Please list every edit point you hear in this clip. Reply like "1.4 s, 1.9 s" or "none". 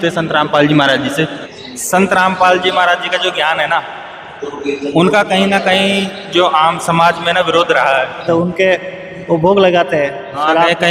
1.4 s, 8.2 s

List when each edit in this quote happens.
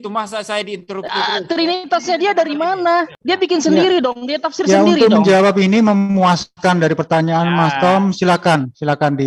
3.1 s

